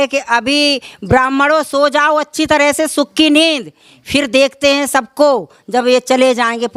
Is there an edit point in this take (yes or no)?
no